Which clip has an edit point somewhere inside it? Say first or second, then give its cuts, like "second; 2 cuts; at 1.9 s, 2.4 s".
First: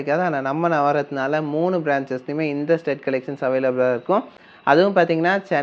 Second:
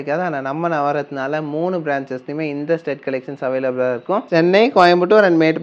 second; 1 cut; at 4.3 s